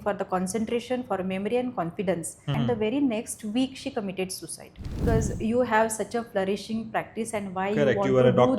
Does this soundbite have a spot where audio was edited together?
yes; 2 cuts; at 2.4 s, 5.0 s

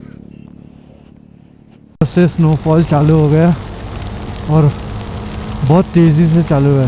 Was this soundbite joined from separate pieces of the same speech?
yes; 1 cut; at 1.9 s

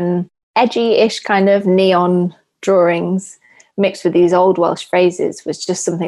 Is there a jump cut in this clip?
no; 0 cuts

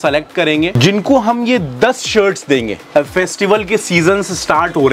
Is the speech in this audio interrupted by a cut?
yes; 2 cuts; at 0.8 s, 2.8 s

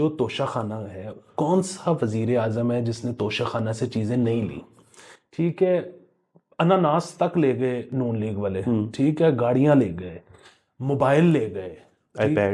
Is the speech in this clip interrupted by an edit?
no; 0 cuts

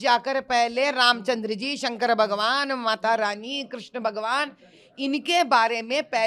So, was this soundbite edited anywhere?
no; 0 cuts

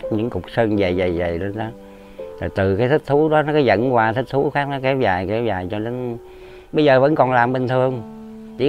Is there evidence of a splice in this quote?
no; 0 cuts

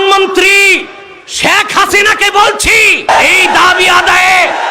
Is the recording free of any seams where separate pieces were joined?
no; 1 cut; at 3.1 s

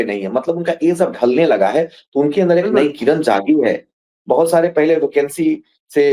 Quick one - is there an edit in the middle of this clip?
no; 0 cuts

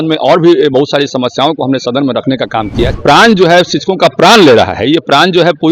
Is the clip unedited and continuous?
no; 1 cut; at 3.0 s

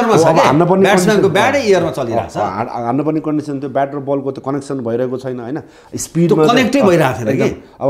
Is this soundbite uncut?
yes; 0 cuts

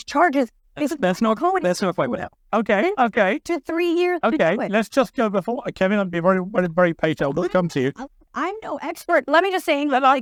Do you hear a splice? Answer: no; 0 cuts

